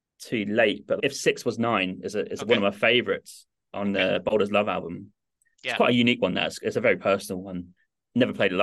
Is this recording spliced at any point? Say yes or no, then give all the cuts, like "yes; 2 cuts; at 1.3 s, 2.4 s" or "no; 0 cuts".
no; 0 cuts